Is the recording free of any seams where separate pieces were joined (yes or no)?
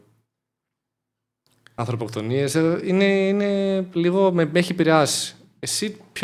yes